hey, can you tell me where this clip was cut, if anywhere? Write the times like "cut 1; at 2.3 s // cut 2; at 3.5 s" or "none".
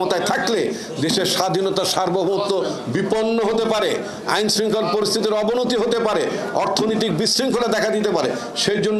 none